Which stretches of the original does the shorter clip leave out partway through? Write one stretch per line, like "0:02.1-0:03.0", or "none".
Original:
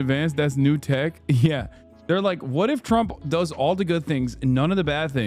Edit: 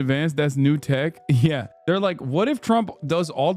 0:01.7-0:01.9